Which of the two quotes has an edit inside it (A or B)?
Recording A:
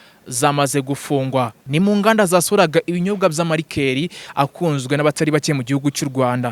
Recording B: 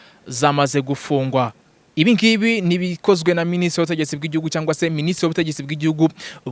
A